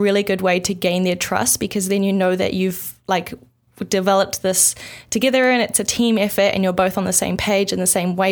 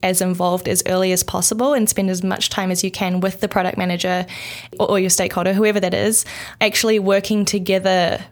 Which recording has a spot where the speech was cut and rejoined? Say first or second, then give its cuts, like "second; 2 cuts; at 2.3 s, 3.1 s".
second; 2 cuts; at 4.7 s, 6.4 s